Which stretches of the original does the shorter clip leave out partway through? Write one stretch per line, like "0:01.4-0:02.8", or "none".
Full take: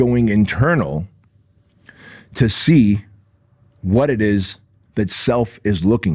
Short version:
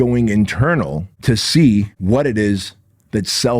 0:01.1-0:02.2
0:03.1-0:03.8

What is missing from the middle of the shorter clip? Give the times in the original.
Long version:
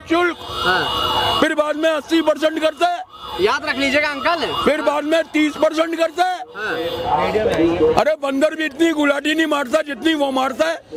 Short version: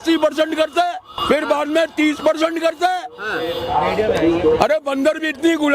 0:03.2-0:04.5

